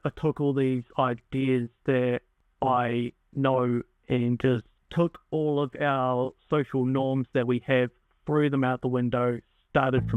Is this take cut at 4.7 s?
yes; 2 cuts; at 2.4 s, 4.7 s

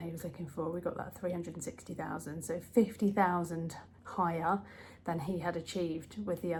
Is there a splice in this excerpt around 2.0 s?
no; 0 cuts

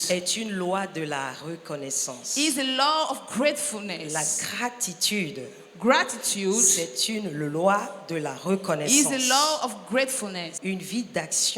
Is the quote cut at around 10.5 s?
yes; 1 cut; at 10.5 s

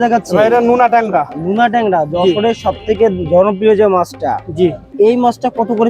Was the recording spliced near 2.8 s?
no; 1 cut; at 4.8 s

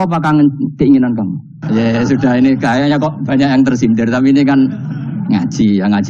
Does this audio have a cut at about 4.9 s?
no; 1 cut; at 1.6 s

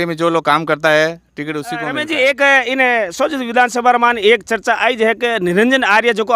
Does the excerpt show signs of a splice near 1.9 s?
yes; 1 cut; at 1.9 s

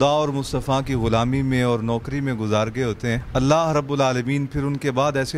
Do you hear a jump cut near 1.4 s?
no; 1 cut; at 3.2 s

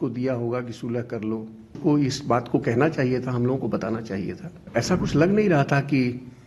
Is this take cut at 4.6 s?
yes; 2 cuts; at 1.8 s, 4.6 s

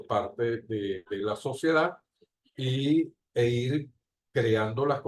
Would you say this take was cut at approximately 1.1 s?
yes; 1 cut; at 1.1 s

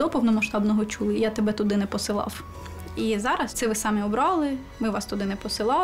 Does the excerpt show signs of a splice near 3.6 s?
yes; 2 cuts; at 1.1 s, 3.6 s

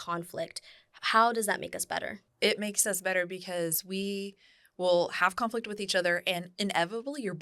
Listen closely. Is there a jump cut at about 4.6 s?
no; 1 cut; at 2.2 s

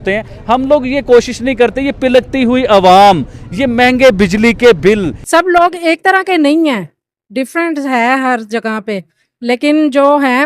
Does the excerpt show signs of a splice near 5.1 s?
yes; 1 cut; at 5.1 s

